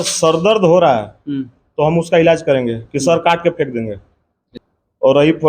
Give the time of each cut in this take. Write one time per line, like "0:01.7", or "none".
0:04.5